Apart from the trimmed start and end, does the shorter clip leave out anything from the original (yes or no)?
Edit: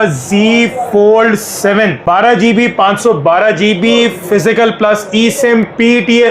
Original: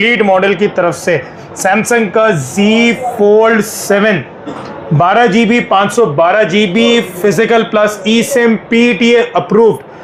yes